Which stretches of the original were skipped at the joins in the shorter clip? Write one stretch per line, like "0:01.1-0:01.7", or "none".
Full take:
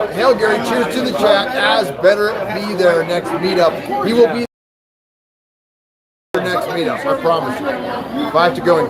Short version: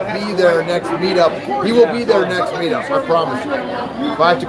0:04.5-0:06.2